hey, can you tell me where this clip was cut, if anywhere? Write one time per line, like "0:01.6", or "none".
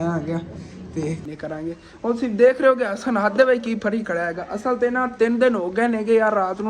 0:01.2